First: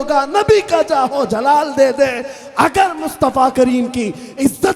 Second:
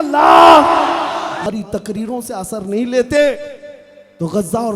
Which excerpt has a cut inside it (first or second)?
second